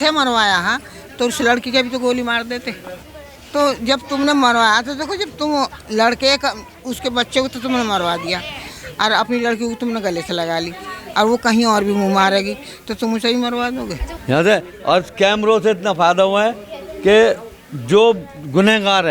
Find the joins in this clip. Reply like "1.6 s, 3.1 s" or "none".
3.0 s, 14.1 s